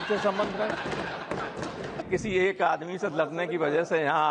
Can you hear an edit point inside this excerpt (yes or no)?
yes